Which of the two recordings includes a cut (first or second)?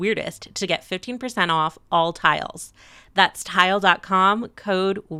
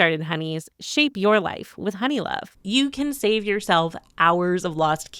second